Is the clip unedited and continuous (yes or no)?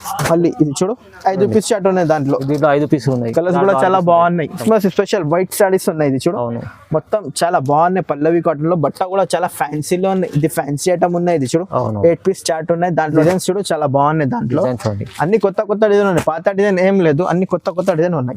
no